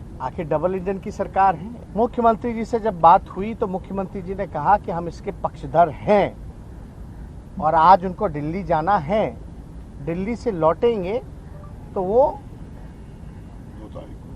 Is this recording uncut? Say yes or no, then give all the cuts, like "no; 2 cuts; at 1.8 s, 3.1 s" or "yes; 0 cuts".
no; 1 cut; at 1.7 s